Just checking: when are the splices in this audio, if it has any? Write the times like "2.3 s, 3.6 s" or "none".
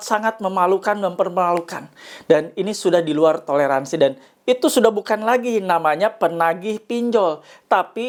none